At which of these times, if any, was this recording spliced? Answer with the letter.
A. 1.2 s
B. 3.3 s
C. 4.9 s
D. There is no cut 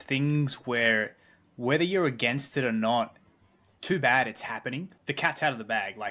C